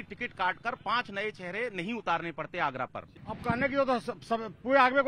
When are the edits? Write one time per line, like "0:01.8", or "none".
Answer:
0:03.2